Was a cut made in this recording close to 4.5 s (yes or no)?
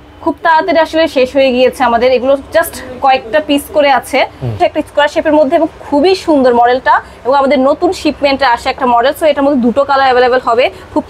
yes